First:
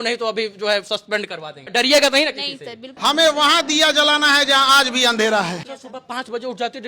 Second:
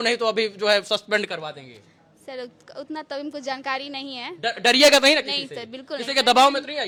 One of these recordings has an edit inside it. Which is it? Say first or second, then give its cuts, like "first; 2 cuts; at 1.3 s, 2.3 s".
first; 3 cuts; at 1.7 s, 2.9 s, 5.5 s